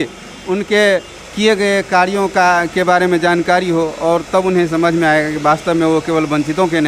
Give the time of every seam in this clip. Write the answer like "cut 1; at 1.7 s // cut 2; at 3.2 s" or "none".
none